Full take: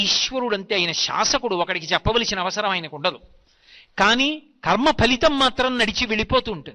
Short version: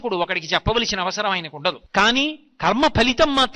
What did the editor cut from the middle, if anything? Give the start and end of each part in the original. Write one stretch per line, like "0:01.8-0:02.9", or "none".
0:03.2-0:03.9